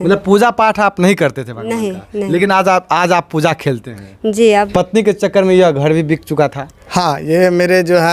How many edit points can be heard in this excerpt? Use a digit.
1